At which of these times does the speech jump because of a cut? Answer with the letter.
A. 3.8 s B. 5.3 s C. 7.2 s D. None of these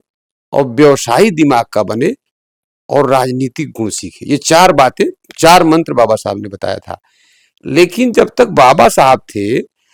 D